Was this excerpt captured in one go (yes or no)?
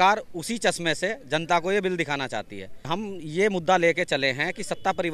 no